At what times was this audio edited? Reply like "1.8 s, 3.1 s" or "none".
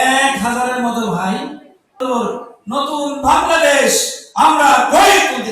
2.0 s